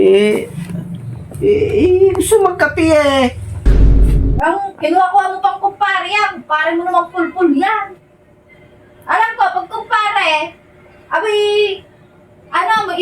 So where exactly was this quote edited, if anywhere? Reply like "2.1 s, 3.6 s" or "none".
3.6 s